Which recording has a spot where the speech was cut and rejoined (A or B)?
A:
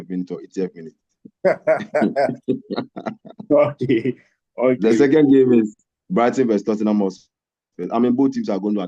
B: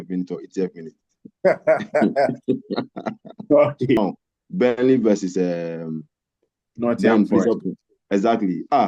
B